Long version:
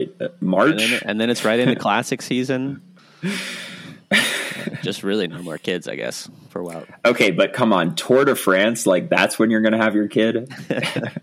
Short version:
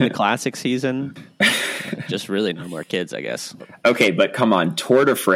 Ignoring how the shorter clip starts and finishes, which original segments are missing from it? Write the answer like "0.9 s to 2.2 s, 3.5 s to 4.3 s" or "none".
3.2 s to 4.3 s, 6.4 s to 6.8 s